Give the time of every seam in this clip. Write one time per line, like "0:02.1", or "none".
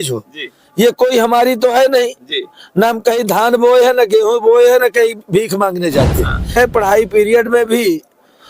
0:06.6